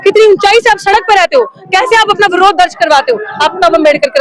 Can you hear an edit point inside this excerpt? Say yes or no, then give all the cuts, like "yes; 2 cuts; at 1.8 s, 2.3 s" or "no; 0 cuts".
no; 0 cuts